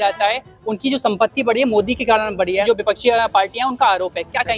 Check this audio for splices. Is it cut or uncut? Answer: cut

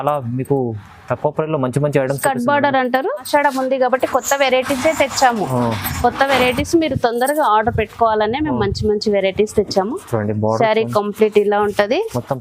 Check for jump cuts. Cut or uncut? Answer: cut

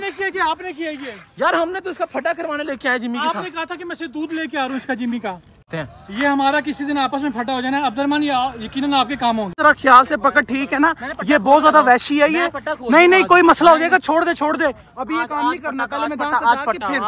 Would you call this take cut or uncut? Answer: cut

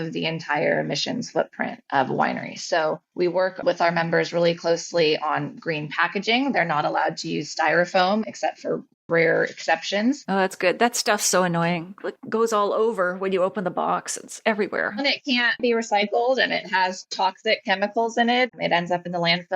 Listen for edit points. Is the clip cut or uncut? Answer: cut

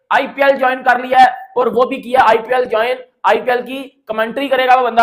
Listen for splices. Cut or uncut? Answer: uncut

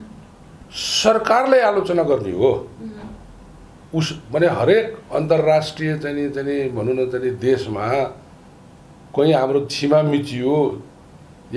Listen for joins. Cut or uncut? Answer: uncut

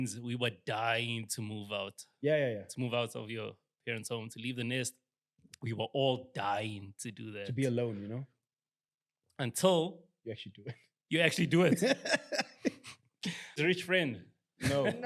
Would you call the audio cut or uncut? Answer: cut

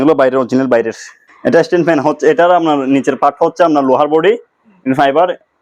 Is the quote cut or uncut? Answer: cut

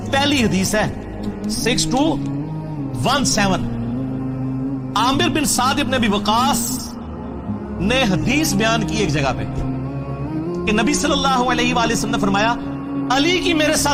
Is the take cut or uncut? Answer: uncut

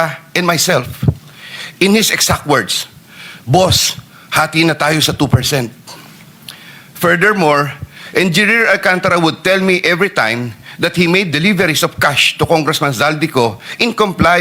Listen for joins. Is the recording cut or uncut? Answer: uncut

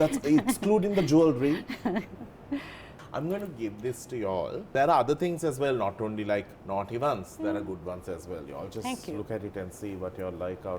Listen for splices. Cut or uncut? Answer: cut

